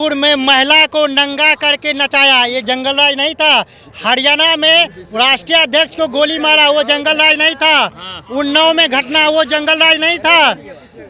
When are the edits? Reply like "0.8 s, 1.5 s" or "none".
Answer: none